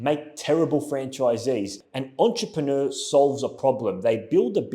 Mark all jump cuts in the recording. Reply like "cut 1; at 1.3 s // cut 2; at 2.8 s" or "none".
cut 1; at 1.8 s